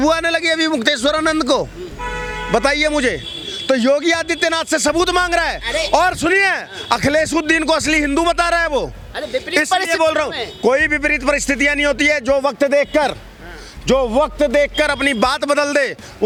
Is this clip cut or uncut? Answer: uncut